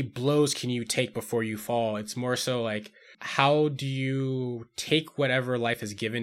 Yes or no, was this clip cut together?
yes